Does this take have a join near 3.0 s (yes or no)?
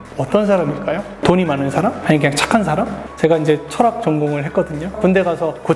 yes